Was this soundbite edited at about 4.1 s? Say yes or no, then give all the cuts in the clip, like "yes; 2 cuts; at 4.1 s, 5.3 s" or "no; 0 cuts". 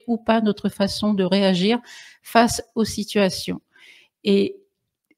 no; 0 cuts